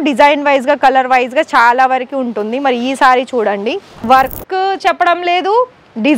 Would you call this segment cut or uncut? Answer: cut